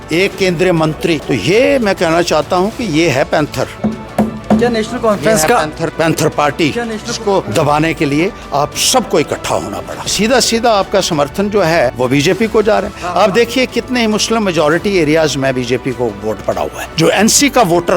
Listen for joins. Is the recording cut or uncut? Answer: cut